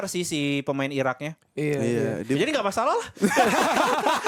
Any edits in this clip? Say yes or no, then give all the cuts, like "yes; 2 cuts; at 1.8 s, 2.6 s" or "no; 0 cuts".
no; 0 cuts